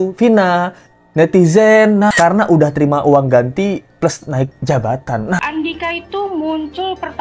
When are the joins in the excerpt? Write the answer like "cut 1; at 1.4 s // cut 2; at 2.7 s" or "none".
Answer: cut 1; at 2.1 s // cut 2; at 5.4 s